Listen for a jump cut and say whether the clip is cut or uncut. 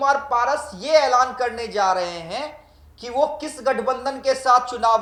uncut